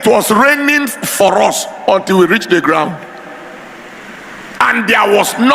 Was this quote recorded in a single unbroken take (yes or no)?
yes